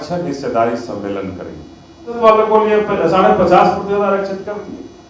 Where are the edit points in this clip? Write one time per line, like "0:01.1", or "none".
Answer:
0:02.2